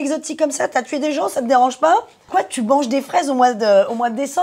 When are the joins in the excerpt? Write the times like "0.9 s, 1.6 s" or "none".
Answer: 2.2 s